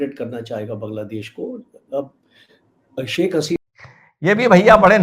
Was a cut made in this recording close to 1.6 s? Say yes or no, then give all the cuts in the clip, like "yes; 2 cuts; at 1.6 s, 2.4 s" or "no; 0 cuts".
no; 1 cut; at 3.6 s